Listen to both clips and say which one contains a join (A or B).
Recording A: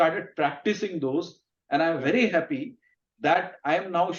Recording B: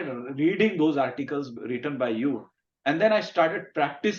B